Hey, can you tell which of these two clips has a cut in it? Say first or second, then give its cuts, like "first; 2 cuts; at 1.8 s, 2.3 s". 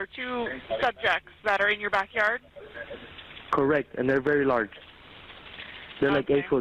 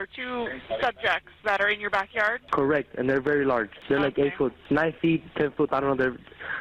second; 3 cuts; at 2.4 s, 3.8 s, 4.6 s